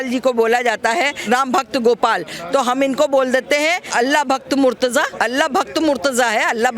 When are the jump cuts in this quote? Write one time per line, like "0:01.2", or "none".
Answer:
0:01.2
0:03.8
0:05.1